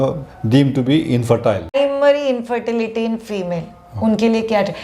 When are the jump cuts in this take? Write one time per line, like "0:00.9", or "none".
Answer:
0:01.7